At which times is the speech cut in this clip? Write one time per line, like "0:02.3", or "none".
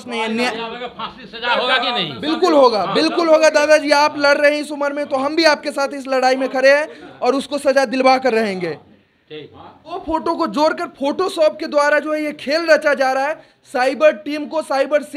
0:10.0